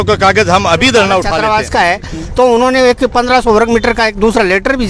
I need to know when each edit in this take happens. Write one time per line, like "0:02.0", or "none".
0:01.3